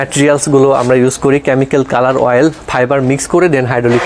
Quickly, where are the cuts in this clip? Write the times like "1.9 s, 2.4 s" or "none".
none